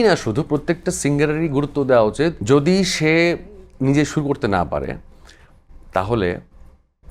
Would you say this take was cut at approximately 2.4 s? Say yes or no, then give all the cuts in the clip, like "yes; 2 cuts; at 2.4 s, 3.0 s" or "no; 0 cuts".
yes; 1 cut; at 2.4 s